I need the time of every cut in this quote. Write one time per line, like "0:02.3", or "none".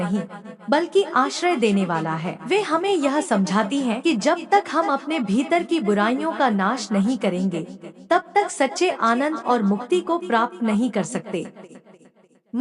0:02.3
0:04.0

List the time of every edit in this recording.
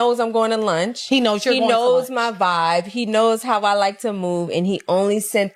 none

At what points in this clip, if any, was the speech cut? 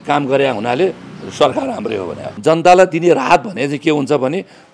0:02.2

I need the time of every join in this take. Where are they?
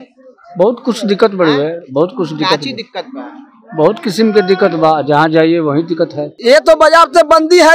0:06.3

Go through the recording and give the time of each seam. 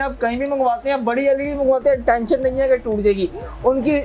none

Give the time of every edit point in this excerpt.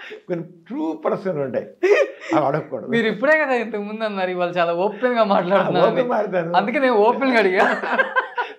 none

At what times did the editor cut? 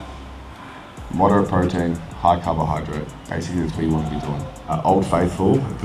0:03.2
0:04.8

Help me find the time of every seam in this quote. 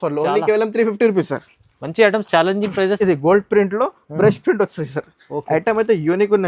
0:03.0

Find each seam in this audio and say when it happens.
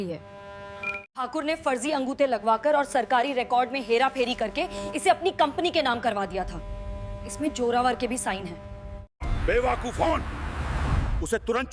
0:01.0
0:09.1

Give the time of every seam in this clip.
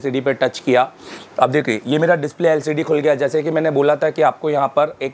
none

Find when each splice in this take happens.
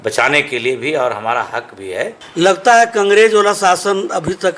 0:02.2

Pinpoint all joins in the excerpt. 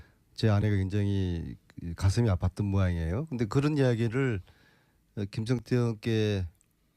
0:06.0

